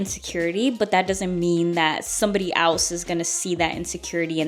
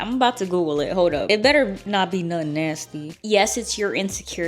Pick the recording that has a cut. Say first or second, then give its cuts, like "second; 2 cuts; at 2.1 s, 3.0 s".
second; 2 cuts; at 1.2 s, 3.1 s